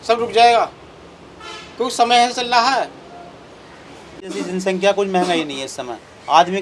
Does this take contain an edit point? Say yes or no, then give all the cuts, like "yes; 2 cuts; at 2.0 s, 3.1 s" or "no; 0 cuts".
yes; 1 cut; at 4.2 s